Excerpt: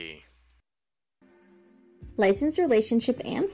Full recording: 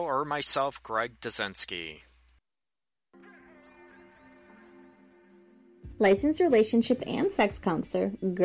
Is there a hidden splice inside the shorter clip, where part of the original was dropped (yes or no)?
yes